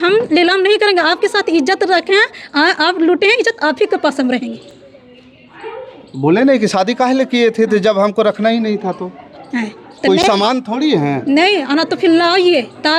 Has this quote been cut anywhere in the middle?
no; 0 cuts

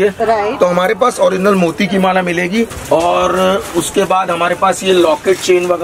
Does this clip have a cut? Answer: yes; 1 cut; at 2.8 s

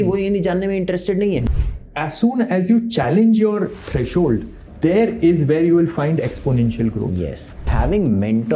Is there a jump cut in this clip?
yes; 3 cuts; at 1.5 s, 4.6 s, 7.7 s

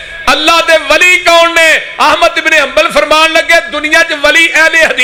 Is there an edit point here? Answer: no; 0 cuts

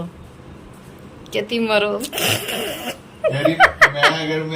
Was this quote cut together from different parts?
no; 0 cuts

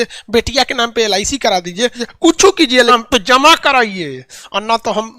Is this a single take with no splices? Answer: no; 2 cuts; at 2.0 s, 2.9 s

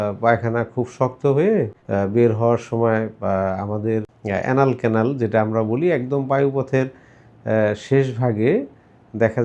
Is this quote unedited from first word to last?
no; 2 cuts; at 1.8 s, 4.1 s

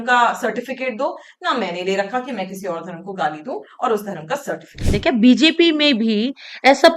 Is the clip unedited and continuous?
no; 1 cut; at 4.9 s

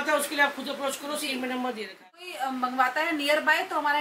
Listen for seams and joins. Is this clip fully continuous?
no; 1 cut; at 2.2 s

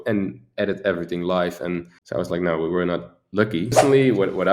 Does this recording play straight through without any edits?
no; 2 cuts; at 2.0 s, 3.8 s

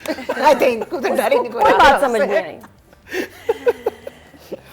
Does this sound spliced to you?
no; 0 cuts

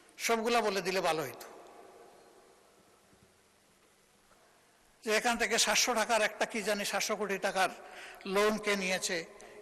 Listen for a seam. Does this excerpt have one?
yes; 1 cut; at 4.4 s

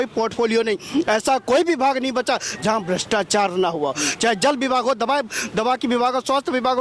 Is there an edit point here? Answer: no; 0 cuts

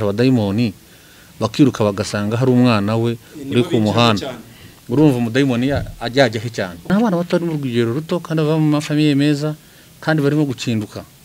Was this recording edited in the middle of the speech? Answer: yes; 1 cut; at 6.9 s

